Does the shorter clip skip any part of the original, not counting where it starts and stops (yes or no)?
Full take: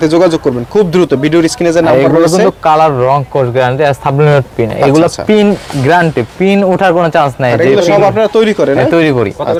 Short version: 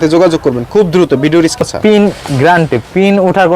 yes